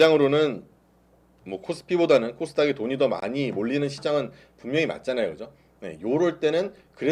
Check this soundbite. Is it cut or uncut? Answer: uncut